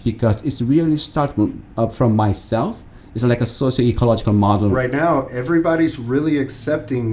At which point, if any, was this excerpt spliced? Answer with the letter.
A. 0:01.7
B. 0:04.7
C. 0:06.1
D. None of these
B